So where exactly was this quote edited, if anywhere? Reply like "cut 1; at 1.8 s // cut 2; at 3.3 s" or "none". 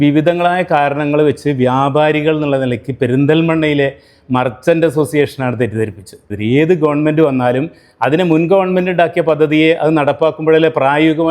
cut 1; at 6.3 s